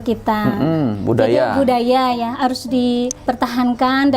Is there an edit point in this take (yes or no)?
yes